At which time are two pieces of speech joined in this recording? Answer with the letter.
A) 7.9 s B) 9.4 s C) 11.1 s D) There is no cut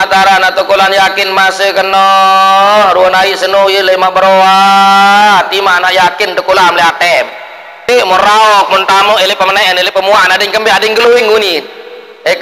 A